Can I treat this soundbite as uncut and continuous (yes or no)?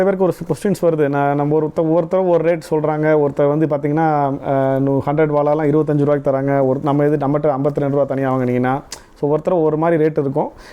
yes